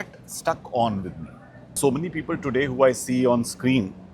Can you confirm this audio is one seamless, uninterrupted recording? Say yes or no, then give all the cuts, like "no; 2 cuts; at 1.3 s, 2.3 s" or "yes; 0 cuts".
no; 1 cut; at 1.8 s